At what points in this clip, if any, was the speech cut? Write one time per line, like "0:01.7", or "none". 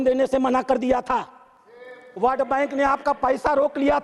none

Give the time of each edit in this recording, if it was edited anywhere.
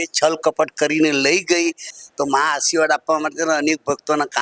0:01.9

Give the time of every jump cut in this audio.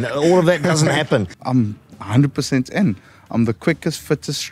0:01.4

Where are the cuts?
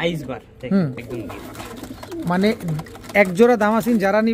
0:01.0

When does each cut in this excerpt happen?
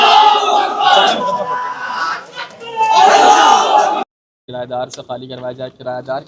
0:04.3

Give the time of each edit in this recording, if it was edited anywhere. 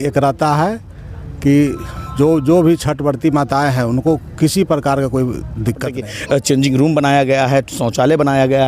0:06.0

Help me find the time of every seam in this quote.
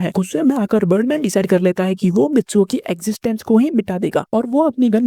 none

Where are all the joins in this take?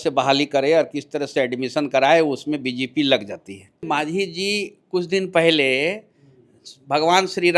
0:03.8

